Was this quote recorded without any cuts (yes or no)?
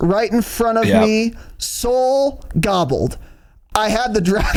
yes